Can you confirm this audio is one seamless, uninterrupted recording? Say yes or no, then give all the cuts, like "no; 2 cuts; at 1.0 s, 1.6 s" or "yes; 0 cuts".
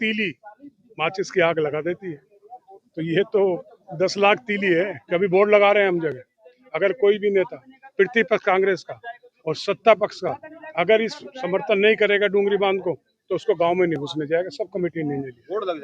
no; 1 cut; at 5.0 s